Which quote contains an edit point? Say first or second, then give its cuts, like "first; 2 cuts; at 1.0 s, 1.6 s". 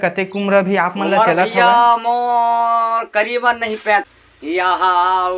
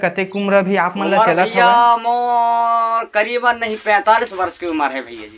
first; 1 cut; at 4.0 s